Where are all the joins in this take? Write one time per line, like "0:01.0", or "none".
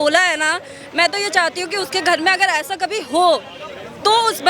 none

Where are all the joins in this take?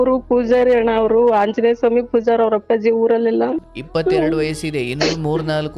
0:03.7

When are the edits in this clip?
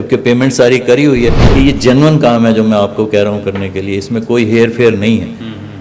0:01.4

